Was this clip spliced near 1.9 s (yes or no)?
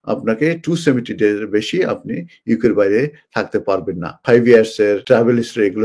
no